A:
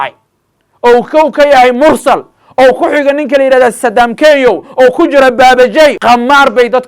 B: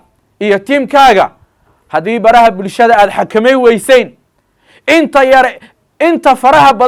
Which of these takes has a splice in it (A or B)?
A